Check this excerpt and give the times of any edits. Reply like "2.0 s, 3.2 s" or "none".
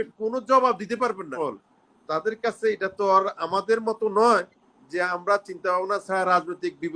1.4 s